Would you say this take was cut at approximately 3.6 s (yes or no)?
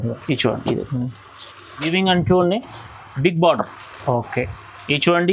no